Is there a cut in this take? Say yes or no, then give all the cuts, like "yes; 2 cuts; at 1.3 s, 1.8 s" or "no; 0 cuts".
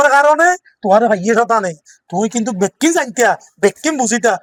no; 0 cuts